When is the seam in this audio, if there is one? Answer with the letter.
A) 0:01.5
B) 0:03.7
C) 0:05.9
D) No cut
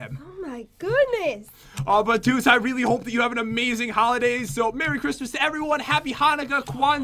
C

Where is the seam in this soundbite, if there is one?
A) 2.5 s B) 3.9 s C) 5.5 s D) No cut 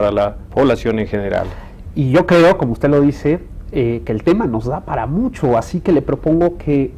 C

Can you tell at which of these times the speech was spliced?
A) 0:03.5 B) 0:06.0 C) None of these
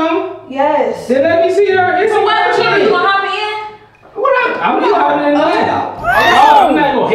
C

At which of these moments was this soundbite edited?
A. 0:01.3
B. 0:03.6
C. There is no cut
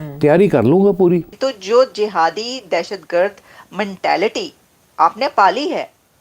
A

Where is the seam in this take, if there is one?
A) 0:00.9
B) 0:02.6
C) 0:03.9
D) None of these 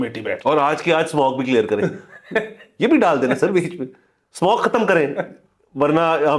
D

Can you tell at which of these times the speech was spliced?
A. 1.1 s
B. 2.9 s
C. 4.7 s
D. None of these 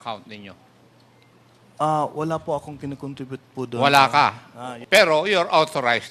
C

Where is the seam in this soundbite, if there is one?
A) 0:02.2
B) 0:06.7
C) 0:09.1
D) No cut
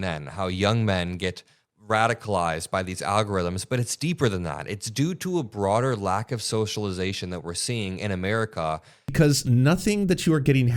C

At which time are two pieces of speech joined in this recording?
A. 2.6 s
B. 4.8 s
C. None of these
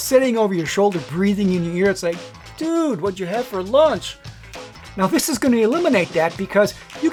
C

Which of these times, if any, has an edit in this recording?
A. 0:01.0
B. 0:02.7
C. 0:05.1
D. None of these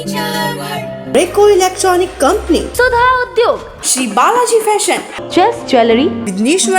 A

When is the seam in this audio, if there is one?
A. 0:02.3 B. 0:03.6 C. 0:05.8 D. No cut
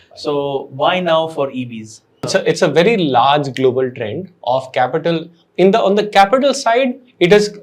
A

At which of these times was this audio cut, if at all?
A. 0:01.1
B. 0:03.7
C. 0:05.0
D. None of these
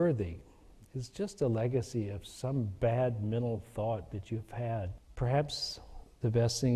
C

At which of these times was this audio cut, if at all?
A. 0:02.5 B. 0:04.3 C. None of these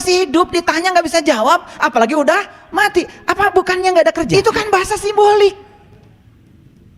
B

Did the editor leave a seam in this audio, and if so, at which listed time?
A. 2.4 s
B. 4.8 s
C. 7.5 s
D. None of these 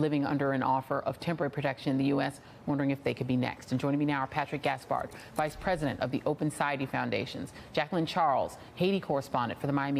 B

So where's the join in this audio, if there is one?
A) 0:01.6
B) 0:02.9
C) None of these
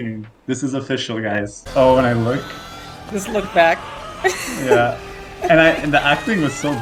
A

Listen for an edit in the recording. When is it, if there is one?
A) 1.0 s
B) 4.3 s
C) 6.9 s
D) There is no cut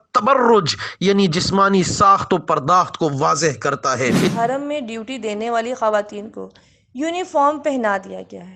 B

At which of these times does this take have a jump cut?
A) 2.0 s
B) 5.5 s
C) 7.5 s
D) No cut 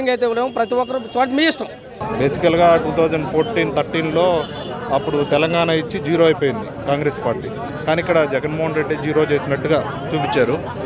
A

